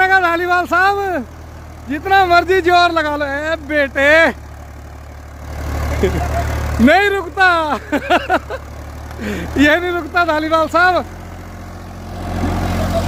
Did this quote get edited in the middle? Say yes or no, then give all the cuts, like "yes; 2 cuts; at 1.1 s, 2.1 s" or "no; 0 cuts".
no; 0 cuts